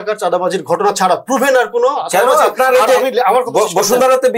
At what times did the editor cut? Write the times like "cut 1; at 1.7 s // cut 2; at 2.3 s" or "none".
none